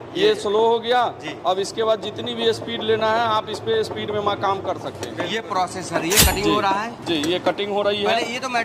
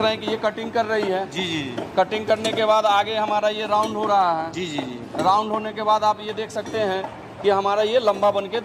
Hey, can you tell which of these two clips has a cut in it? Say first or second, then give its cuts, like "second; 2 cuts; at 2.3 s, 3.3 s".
first; 1 cut; at 5.0 s